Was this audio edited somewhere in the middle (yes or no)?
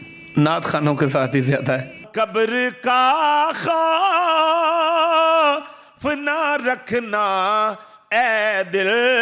yes